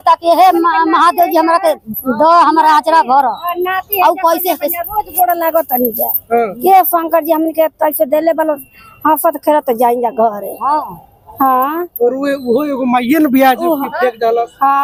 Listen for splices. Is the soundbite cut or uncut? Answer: uncut